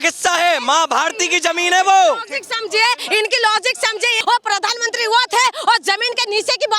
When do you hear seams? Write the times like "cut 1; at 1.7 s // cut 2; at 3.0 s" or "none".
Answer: cut 1; at 4.2 s